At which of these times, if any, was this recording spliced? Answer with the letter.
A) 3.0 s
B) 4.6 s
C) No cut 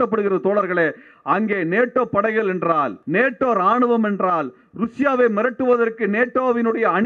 A